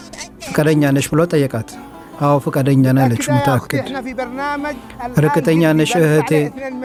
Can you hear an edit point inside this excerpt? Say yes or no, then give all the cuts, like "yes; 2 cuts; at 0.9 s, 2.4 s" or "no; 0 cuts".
no; 0 cuts